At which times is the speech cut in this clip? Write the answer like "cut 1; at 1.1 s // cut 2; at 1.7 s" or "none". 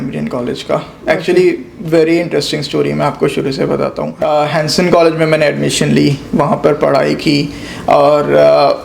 cut 1; at 4.1 s